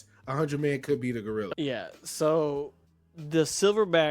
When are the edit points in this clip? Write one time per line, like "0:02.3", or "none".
0:01.6